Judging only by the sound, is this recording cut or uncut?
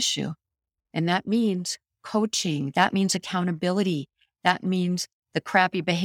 uncut